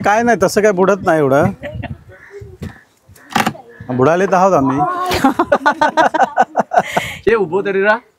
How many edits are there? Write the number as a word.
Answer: zero